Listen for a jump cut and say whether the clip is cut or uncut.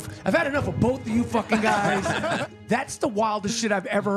cut